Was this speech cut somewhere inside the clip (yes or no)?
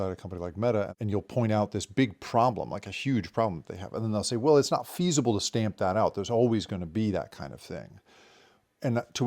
yes